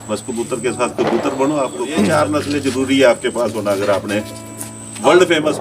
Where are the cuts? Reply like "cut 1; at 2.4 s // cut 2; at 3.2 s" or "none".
cut 1; at 2.1 s